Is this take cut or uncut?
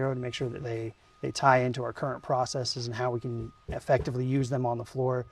uncut